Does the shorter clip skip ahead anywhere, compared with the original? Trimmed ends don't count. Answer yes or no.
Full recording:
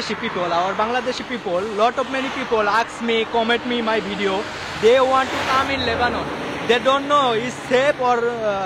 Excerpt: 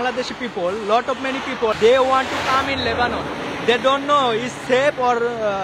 yes